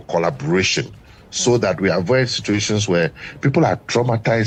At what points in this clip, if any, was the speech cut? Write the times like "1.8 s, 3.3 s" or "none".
none